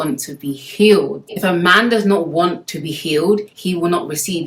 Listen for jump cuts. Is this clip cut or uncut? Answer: cut